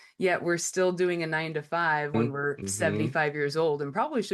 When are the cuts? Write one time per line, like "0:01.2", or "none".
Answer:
0:02.1